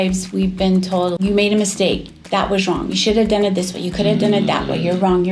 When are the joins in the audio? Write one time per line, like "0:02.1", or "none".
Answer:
0:01.2